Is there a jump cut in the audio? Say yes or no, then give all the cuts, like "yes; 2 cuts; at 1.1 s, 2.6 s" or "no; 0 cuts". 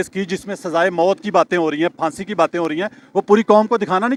no; 0 cuts